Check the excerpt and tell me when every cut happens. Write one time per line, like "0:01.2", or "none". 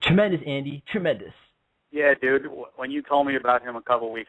none